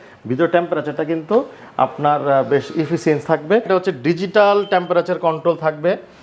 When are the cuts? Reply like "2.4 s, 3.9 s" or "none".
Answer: 3.7 s

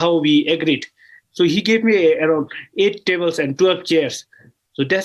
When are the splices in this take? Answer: none

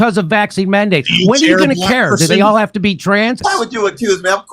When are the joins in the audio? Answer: 3.4 s

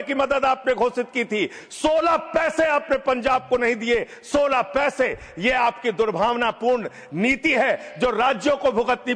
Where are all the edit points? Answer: none

